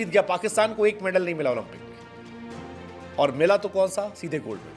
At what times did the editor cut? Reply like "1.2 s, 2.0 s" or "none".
none